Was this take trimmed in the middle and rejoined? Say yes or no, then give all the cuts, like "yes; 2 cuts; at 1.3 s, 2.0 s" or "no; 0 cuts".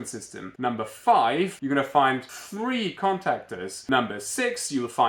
yes; 3 cuts; at 1.6 s, 2.3 s, 3.7 s